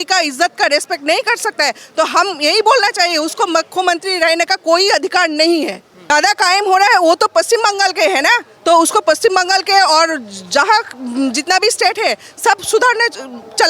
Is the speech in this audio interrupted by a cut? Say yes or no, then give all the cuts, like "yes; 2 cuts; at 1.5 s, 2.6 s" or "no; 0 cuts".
yes; 1 cut; at 6.1 s